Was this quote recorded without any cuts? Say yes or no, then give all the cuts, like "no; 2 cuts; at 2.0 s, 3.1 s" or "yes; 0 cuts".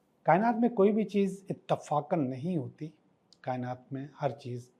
yes; 0 cuts